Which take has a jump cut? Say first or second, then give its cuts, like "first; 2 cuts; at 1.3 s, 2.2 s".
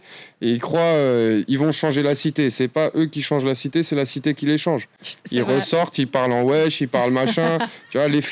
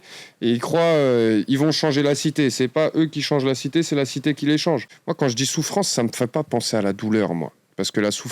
second; 1 cut; at 5.0 s